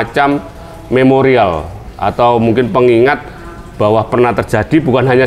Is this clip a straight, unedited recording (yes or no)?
yes